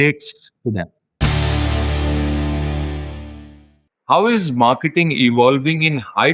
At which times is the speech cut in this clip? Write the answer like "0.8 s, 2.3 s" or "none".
1.0 s, 3.6 s